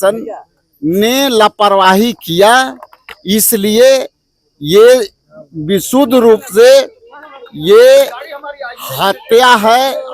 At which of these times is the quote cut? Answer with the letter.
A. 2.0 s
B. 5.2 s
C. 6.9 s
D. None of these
D